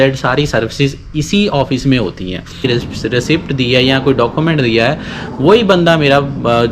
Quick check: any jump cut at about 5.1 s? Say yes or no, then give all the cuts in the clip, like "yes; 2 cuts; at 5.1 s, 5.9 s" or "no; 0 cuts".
no; 1 cut; at 2.7 s